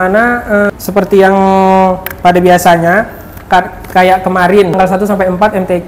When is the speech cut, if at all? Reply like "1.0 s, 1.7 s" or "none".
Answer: 0.7 s, 4.8 s